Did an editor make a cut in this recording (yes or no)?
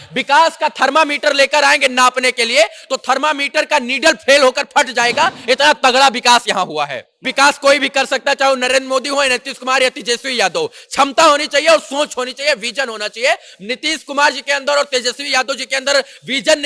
yes